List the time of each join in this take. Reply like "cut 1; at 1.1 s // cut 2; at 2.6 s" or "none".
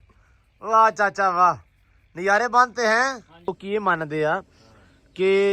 cut 1; at 3.5 s